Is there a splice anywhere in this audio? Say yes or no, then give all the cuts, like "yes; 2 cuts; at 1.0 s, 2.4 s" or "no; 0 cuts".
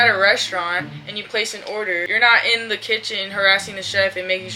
yes; 1 cut; at 2.1 s